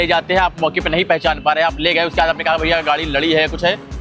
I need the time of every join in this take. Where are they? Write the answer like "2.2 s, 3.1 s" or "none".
none